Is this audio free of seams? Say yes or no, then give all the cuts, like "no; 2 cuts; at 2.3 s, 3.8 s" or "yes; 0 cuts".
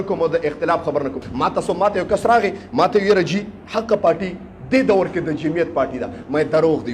no; 1 cut; at 1.2 s